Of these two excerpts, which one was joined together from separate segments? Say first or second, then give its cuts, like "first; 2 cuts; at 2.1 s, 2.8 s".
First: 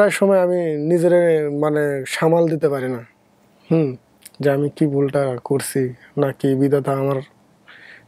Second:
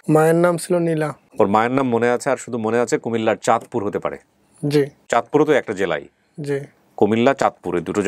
second; 2 cuts; at 1.2 s, 5.0 s